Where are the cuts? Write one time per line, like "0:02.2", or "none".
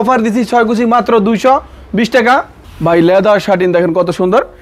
0:02.6